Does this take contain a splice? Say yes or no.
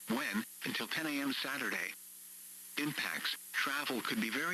no